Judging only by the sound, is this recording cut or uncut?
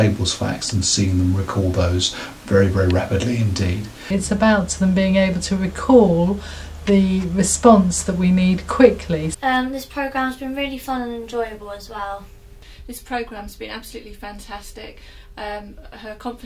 cut